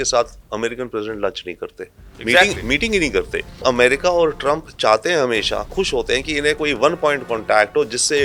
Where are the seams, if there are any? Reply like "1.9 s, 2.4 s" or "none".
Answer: 3.6 s